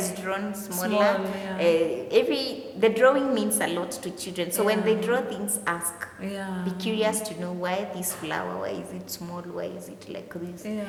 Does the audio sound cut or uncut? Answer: uncut